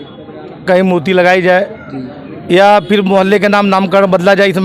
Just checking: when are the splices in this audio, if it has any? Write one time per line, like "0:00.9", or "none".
none

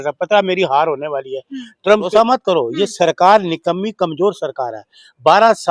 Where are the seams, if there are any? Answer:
0:02.1

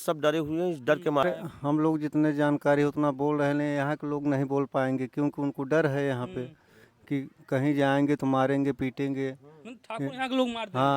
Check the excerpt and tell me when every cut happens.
0:01.2

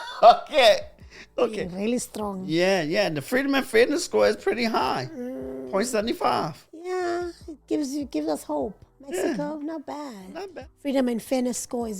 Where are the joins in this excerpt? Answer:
0:01.7
0:10.3

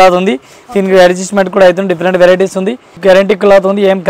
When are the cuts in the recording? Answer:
0:02.9

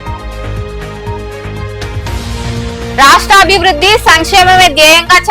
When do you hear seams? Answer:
0:01.9

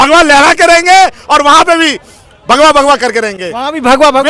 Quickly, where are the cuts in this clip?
none

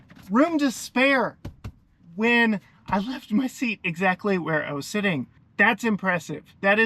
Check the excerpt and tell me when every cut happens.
0:05.4

